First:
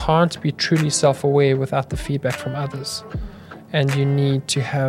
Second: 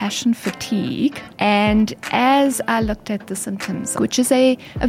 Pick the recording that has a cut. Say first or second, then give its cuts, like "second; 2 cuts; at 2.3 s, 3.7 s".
second; 2 cuts; at 1.2 s, 4.0 s